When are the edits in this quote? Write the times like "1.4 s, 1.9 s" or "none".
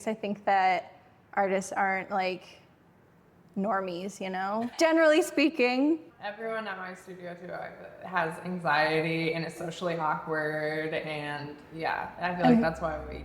4.7 s, 6.1 s